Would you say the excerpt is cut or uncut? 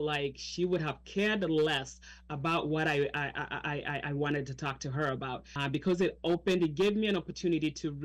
cut